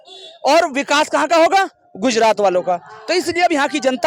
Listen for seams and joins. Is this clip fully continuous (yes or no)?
yes